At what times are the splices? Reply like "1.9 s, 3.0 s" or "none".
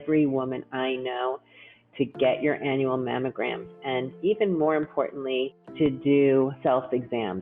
5.6 s, 6.6 s